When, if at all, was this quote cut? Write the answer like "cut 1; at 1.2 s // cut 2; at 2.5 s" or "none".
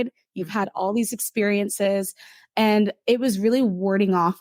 none

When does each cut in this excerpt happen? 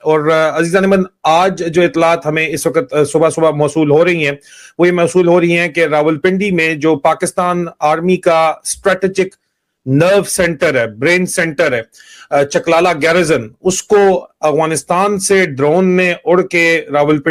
none

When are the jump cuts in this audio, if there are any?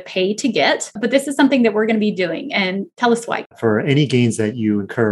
cut 1; at 1.0 s // cut 2; at 3.5 s

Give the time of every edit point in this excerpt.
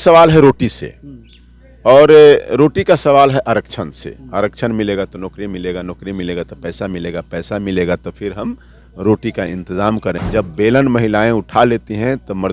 cut 1; at 10.2 s

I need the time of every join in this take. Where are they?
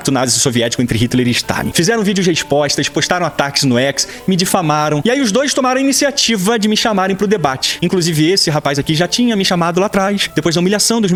none

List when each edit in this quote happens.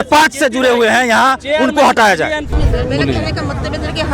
cut 1; at 2.5 s

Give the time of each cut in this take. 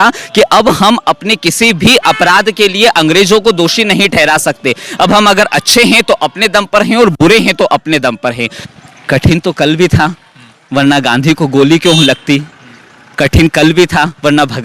cut 1; at 8.5 s

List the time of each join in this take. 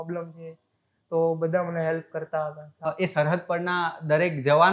cut 1; at 2.9 s

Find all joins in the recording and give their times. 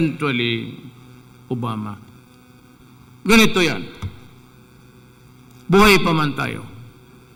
none

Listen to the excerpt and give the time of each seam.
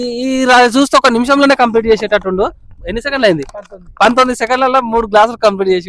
none

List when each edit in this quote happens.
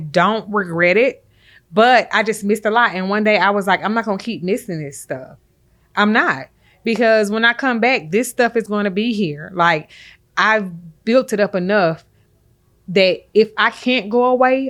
none

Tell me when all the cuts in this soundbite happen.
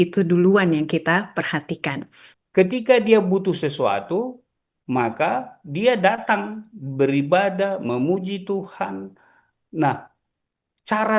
cut 1; at 2.3 s

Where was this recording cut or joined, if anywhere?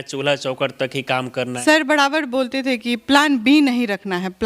cut 1; at 1.5 s

